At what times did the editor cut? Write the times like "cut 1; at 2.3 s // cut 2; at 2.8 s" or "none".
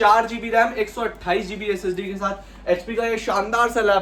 none